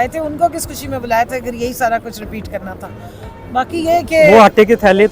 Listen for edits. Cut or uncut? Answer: uncut